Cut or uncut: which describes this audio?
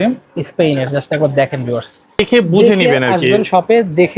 cut